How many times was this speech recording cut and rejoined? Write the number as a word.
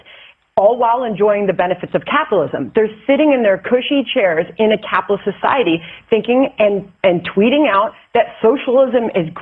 one